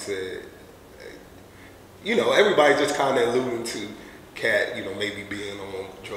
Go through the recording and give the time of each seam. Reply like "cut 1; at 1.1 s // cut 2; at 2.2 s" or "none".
none